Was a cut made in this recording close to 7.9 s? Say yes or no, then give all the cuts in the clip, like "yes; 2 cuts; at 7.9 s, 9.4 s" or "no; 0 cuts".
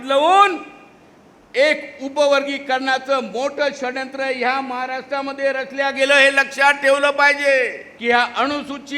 yes; 1 cut; at 7.9 s